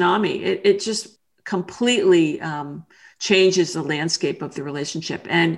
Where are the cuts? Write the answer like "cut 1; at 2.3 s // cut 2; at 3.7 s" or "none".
cut 1; at 1.0 s